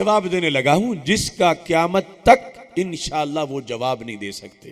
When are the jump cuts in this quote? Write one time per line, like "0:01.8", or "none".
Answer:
none